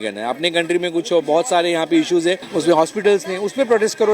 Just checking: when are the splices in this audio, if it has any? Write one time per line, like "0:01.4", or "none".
0:02.4

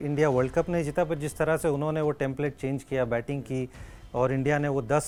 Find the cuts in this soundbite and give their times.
none

